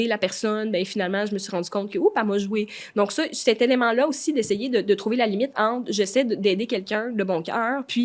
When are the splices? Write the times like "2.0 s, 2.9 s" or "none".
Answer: none